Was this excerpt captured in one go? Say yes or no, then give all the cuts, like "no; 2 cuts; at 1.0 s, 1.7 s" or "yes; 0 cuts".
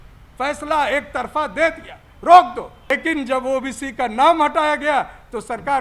no; 1 cut; at 2.9 s